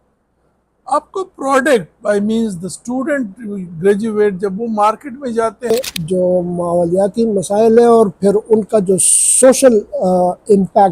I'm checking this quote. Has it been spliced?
yes; 1 cut; at 5.7 s

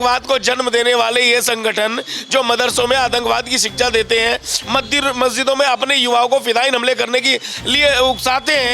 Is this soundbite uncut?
yes; 0 cuts

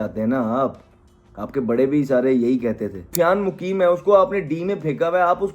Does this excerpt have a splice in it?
yes; 1 cut; at 3.2 s

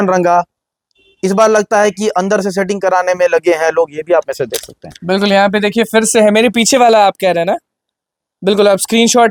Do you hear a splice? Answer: no; 0 cuts

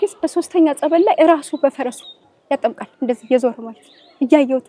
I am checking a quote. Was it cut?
no; 0 cuts

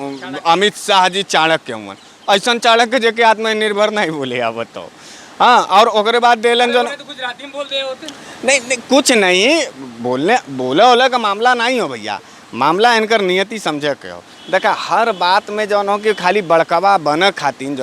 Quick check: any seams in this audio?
no; 0 cuts

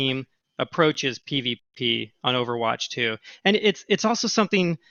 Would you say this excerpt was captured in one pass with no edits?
yes; 0 cuts

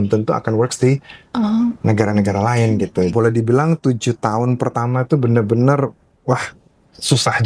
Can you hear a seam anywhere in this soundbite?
yes; 1 cut; at 3.1 s

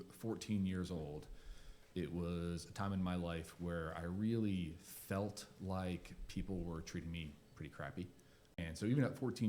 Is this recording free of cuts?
no; 1 cut; at 8.6 s

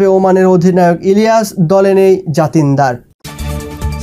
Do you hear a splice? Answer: yes; 1 cut; at 3.1 s

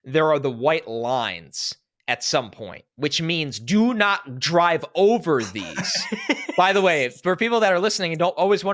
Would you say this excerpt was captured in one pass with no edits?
yes; 0 cuts

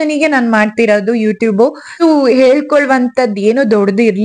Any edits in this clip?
yes; 1 cut; at 2.0 s

